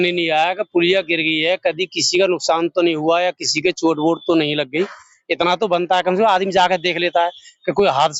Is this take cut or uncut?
uncut